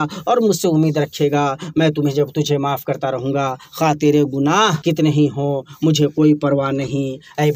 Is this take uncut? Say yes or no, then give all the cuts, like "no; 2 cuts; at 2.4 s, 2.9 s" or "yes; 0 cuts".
no; 1 cut; at 4.8 s